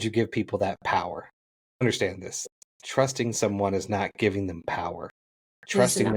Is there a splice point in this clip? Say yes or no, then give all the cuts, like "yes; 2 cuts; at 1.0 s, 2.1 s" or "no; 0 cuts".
yes; 1 cut; at 1.8 s